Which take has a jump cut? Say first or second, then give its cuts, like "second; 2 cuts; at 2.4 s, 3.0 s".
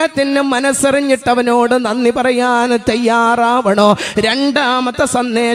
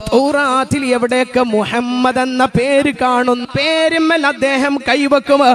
second; 1 cut; at 3.4 s